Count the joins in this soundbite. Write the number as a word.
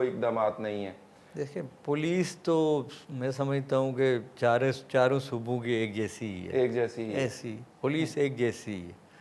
zero